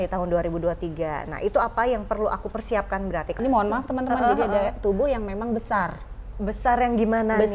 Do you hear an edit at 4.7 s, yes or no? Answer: no